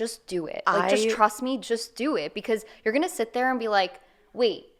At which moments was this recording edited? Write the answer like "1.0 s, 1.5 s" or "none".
none